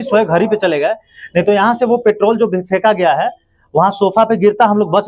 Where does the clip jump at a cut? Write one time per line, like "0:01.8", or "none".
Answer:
none